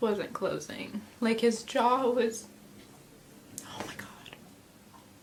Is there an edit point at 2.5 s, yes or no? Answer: no